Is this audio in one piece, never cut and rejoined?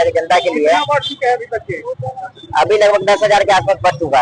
yes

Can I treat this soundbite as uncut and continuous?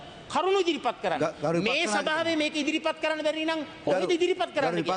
yes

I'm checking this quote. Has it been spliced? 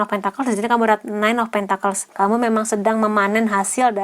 yes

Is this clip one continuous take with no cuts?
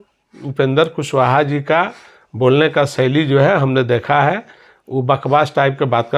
yes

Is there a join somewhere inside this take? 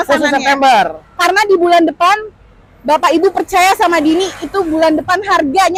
no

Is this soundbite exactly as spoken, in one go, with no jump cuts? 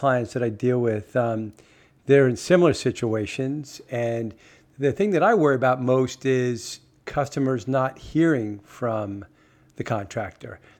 yes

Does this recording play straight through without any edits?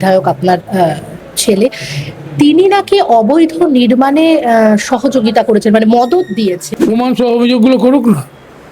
no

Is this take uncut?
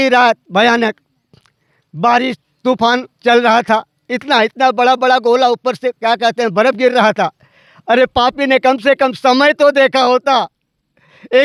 yes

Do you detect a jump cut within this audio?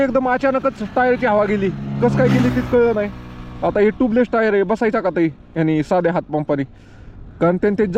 no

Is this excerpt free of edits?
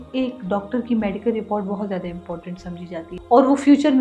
no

